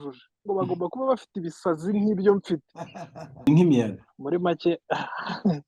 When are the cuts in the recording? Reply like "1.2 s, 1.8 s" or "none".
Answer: 3.4 s